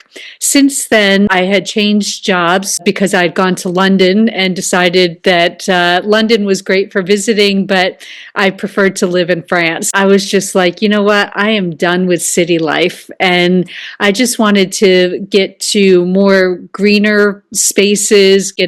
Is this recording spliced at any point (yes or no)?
yes